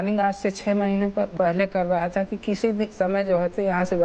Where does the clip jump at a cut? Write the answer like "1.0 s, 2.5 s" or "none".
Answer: 1.3 s